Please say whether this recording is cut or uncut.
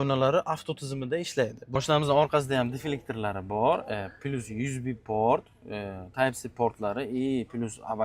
cut